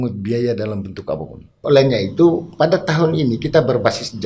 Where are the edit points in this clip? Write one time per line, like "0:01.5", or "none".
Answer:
0:01.6